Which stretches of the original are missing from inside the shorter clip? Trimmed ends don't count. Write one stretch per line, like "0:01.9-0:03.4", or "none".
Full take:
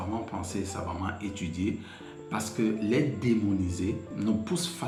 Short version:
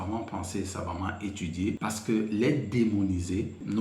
0:01.8-0:02.3